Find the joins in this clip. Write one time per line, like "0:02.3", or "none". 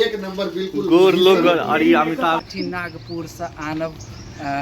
0:02.5